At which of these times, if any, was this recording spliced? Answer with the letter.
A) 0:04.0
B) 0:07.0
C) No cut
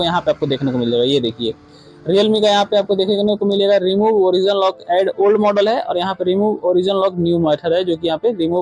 C